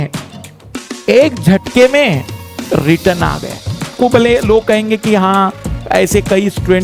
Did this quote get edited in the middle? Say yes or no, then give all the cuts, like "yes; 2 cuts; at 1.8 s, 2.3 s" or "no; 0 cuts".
yes; 1 cut; at 3.9 s